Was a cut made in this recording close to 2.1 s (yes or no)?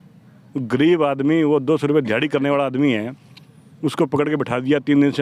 no